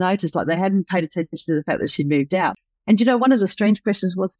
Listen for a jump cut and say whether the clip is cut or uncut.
cut